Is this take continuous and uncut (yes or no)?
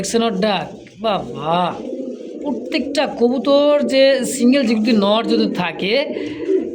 yes